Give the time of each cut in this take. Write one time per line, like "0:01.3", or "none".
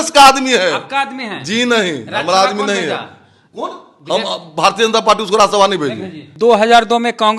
0:06.2